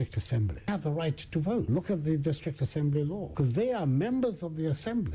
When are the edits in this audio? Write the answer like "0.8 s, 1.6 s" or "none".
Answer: 1.7 s, 3.3 s